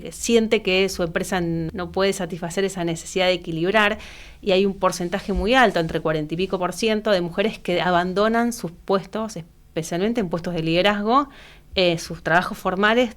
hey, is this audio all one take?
no; 1 cut; at 1.7 s

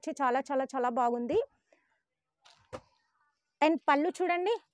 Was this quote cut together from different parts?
no; 0 cuts

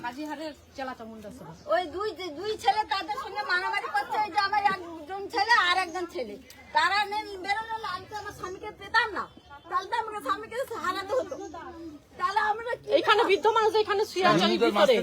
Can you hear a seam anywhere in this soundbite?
no; 0 cuts

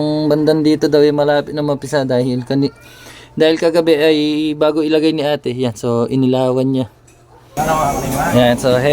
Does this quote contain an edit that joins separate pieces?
yes; 1 cut; at 7.4 s

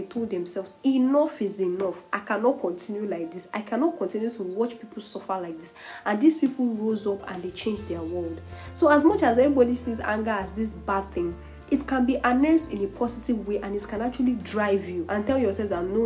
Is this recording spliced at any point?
no; 0 cuts

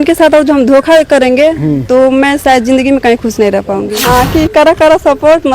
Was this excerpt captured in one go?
no; 1 cut; at 4.0 s

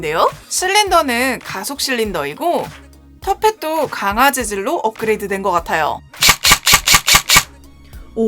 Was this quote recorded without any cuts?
no; 1 cut; at 6.0 s

